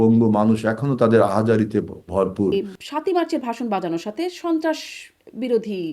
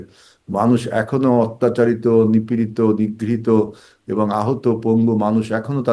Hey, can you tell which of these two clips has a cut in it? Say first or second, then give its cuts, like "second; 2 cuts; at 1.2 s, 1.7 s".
first; 1 cut; at 2.5 s